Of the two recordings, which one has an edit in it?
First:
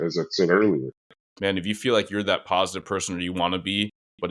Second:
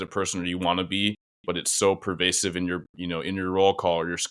first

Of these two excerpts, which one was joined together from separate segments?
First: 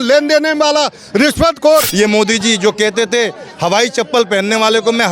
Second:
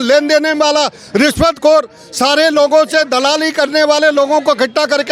first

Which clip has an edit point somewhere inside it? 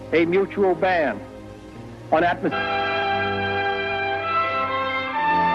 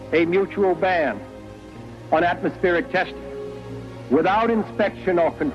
second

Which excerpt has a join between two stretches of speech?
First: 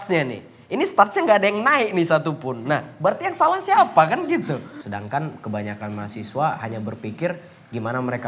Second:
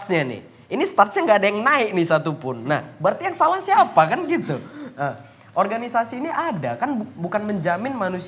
first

